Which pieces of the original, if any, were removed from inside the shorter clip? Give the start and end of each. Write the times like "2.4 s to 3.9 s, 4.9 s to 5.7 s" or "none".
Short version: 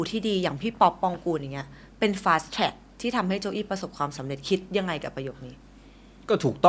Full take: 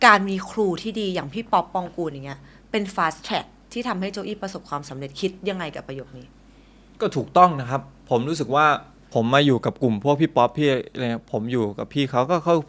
none